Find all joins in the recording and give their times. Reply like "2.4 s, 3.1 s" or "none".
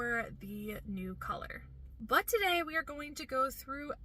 1.9 s

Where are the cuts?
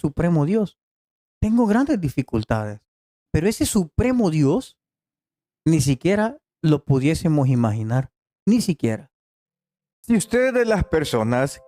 9.9 s

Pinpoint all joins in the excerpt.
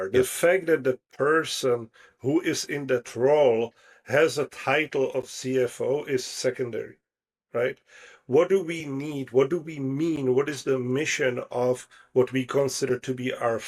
none

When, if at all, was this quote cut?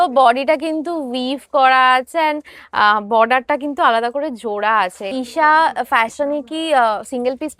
5.1 s

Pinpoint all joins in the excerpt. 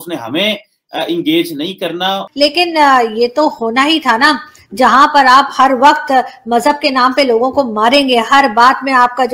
2.2 s

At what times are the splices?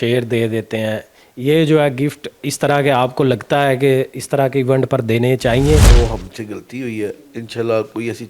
5.9 s

